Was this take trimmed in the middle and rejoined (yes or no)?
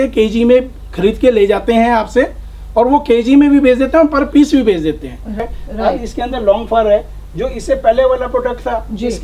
yes